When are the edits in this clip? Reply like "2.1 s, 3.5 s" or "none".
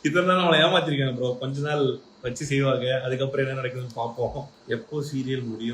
4.5 s